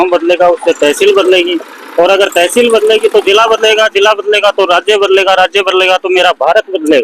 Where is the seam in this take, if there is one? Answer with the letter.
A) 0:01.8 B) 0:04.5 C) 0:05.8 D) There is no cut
D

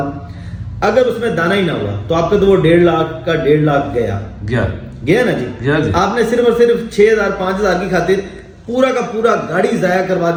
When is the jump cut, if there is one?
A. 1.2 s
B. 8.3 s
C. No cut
C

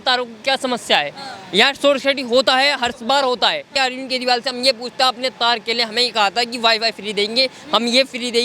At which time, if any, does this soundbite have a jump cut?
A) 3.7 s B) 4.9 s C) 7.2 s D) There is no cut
A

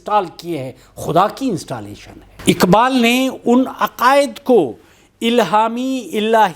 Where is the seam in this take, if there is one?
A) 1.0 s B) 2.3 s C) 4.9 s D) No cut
B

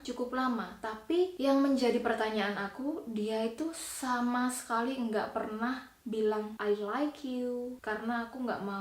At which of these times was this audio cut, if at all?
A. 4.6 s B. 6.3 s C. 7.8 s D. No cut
C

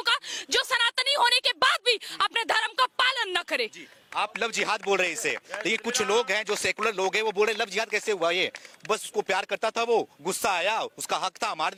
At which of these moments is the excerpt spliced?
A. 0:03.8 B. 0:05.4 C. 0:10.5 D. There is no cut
D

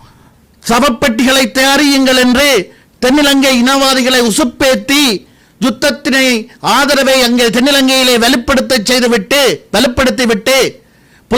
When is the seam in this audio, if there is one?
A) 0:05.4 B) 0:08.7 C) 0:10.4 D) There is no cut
D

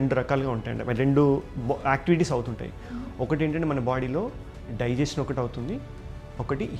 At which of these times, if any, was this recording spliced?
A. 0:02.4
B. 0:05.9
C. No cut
C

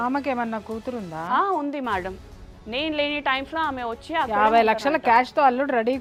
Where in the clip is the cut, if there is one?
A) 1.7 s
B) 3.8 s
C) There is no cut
C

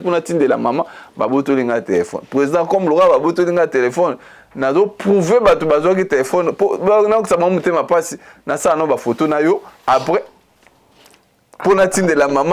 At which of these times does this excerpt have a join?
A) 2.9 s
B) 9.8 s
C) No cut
C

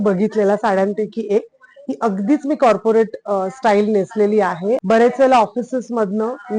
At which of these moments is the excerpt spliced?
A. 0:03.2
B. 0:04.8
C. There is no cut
B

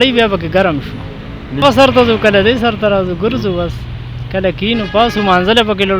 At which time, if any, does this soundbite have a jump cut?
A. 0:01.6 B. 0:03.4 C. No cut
A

